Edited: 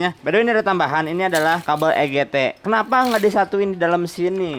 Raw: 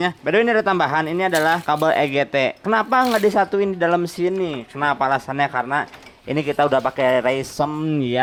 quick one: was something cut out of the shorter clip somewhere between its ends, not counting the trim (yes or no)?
no